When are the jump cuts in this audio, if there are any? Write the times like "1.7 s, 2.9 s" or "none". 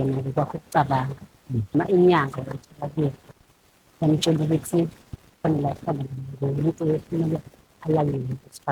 1.7 s